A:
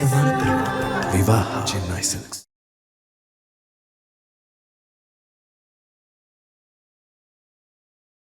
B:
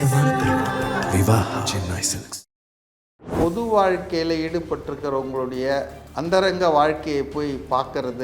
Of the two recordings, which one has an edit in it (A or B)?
B